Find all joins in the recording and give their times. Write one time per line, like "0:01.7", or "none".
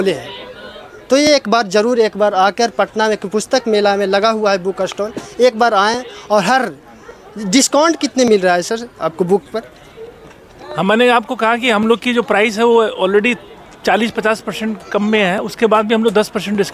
none

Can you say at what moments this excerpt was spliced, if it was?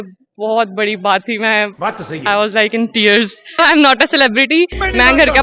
0:03.6

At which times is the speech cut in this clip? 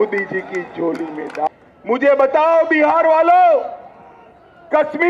0:01.5

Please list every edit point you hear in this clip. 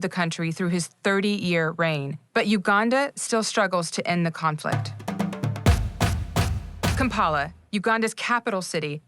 0:06.2
0:08.2

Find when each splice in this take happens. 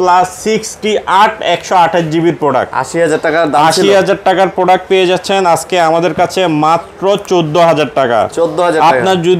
none

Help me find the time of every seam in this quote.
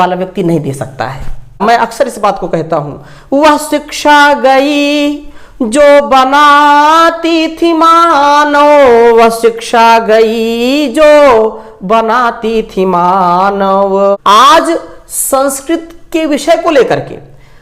0:01.6
0:14.2

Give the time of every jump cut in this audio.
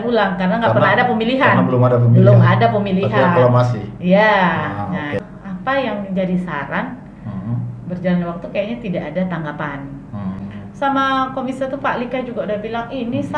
0:05.2
0:10.4

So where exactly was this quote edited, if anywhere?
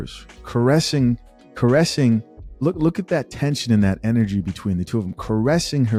none

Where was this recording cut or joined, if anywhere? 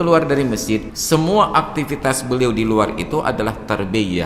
0:00.9

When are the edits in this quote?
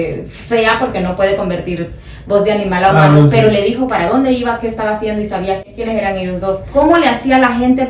0:05.7
0:06.6

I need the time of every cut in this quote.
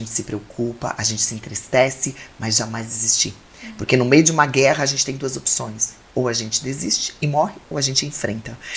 none

